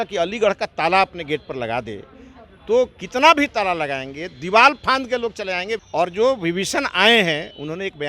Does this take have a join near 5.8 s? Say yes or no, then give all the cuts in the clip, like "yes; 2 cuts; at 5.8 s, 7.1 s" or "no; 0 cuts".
yes; 1 cut; at 5.8 s